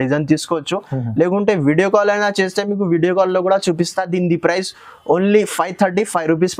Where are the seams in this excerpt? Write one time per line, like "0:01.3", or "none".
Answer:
none